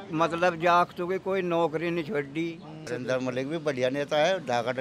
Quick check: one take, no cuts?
no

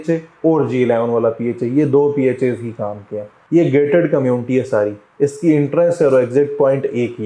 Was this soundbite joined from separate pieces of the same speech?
yes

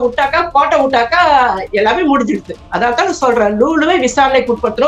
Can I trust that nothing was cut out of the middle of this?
yes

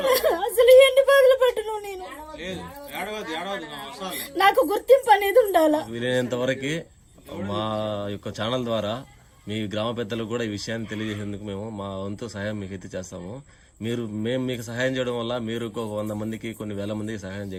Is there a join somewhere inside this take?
no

